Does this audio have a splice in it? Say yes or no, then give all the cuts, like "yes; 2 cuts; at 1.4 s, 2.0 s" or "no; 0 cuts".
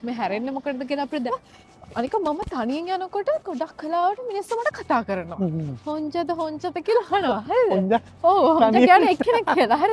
yes; 1 cut; at 1.3 s